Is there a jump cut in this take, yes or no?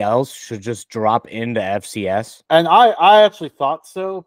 yes